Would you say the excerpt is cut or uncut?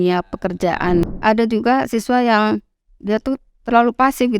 cut